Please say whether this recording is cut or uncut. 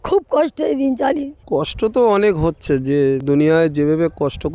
cut